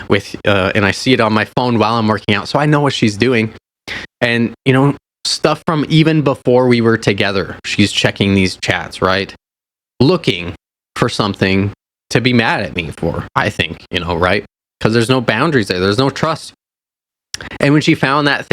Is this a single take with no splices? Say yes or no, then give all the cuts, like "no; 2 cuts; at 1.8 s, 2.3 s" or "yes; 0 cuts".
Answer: yes; 0 cuts